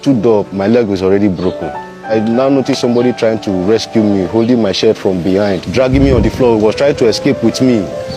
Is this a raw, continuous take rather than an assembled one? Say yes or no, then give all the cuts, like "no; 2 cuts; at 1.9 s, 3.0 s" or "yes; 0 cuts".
no; 2 cuts; at 2.1 s, 5.6 s